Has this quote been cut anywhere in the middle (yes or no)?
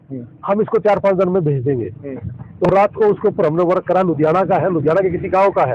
no